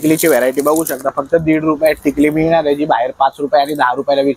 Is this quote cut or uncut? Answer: uncut